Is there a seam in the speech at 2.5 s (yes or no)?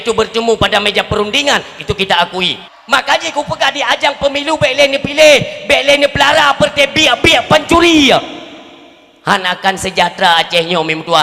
yes